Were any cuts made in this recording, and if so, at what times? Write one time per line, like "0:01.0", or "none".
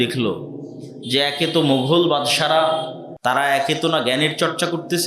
0:03.0